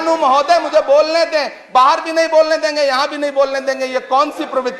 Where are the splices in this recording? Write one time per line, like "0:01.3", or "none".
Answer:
none